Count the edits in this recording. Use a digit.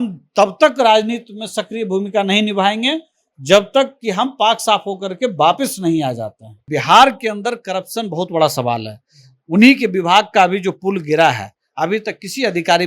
1